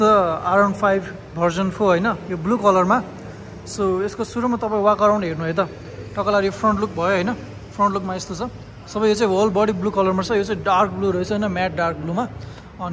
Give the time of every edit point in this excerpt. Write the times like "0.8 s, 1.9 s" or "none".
none